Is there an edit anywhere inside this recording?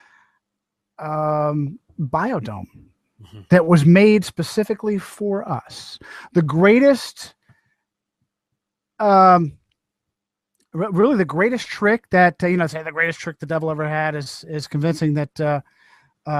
no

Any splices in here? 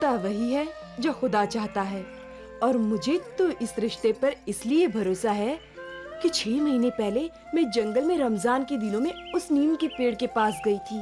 no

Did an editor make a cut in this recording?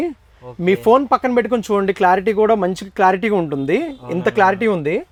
no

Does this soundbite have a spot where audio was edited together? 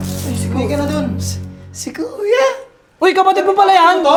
no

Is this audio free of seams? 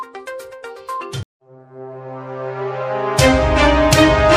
yes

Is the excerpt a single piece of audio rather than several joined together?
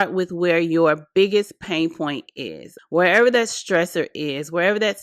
no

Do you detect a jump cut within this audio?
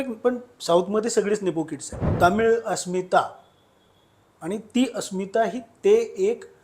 yes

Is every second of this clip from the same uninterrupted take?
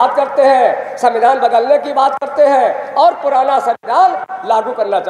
yes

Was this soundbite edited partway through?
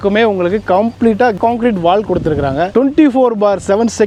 no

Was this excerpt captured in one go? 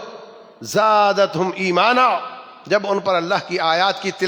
yes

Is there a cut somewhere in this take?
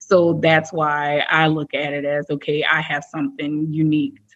no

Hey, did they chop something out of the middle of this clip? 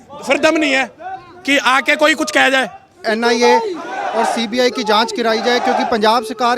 yes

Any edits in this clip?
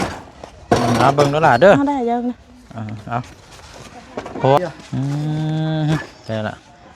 yes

